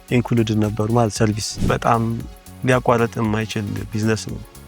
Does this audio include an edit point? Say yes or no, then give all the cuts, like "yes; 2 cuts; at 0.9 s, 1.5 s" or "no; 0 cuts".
yes; 1 cut; at 1.5 s